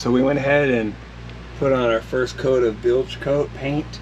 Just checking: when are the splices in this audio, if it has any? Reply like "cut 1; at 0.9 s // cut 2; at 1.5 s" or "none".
none